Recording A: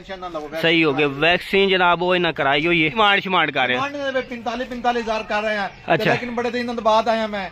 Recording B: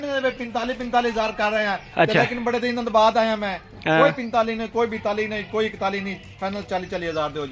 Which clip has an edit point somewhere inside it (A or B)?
A